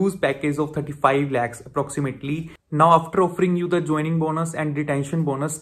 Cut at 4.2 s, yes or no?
no